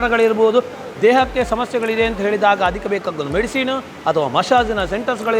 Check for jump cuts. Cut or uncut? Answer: uncut